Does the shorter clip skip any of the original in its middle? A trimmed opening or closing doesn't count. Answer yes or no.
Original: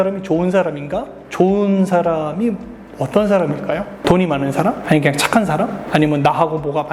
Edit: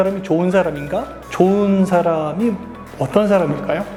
no